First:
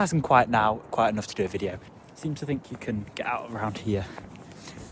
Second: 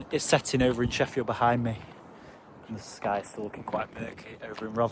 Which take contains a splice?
first; 1 cut; at 1.9 s

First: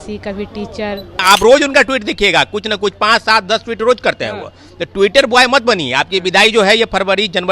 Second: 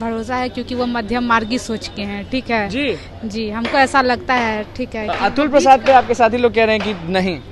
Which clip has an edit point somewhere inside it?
first; 1 cut; at 1.2 s

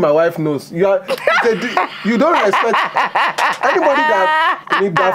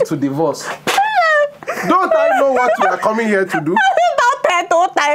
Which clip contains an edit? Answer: second; 1 cut; at 1.6 s

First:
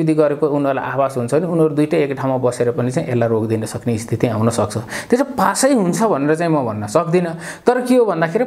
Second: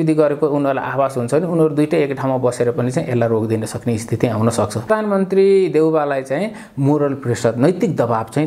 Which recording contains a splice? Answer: second; 1 cut; at 4.9 s

